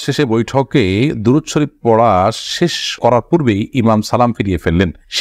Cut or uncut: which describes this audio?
uncut